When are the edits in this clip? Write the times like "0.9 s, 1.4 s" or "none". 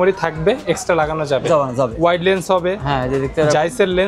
1.9 s